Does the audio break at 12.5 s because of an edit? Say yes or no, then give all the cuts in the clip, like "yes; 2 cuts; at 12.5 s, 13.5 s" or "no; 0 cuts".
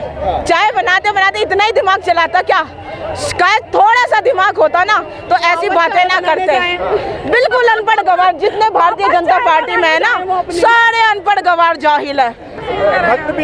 yes; 1 cut; at 12.5 s